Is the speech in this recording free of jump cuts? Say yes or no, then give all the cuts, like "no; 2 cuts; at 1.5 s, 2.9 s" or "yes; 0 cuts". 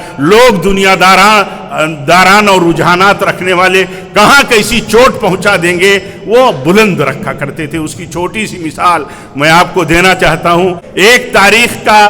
no; 1 cut; at 10.8 s